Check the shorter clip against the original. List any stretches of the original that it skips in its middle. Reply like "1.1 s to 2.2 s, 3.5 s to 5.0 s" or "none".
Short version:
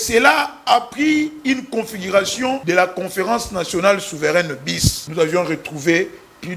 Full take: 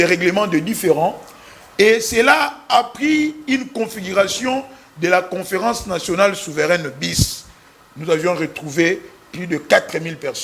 4.6 s to 5.0 s, 7.3 s to 7.9 s